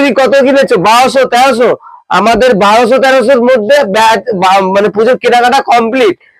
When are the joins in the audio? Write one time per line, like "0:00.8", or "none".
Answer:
none